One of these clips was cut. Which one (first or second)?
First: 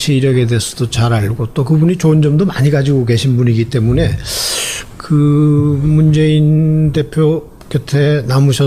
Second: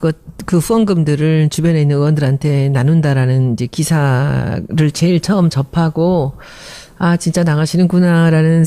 second